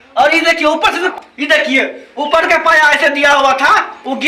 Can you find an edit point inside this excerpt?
yes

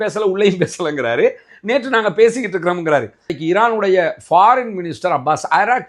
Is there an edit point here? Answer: yes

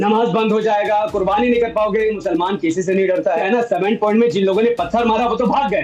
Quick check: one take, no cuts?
no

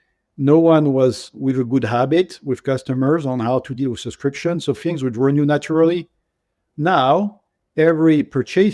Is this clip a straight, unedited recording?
no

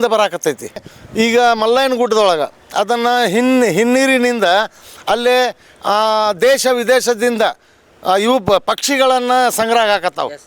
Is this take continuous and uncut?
no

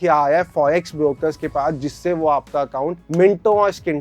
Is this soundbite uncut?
yes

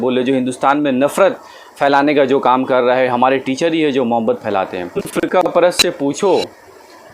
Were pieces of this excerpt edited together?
yes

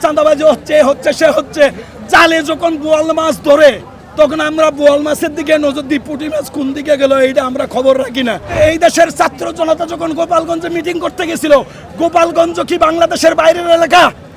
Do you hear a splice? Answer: yes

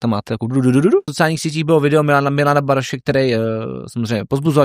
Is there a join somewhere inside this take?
yes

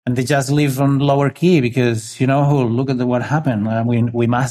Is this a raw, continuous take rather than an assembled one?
yes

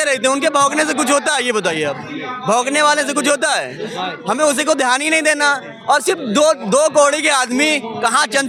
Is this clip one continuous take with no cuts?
yes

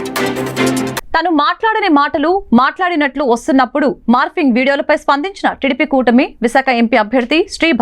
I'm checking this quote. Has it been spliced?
yes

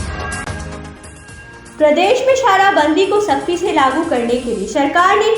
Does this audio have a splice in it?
yes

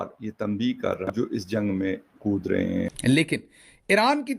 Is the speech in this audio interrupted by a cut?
yes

